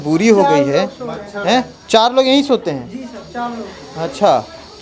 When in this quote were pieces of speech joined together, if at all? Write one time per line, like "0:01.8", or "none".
none